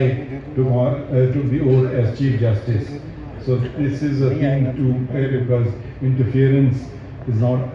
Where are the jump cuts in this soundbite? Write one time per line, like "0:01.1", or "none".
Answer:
0:05.3